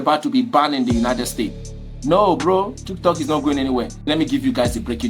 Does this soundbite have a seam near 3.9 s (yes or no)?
yes